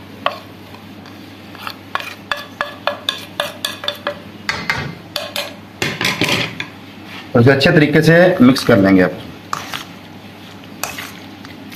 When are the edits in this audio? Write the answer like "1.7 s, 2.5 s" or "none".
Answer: none